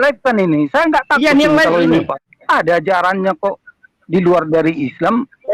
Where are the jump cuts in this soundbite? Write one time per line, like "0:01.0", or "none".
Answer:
0:02.3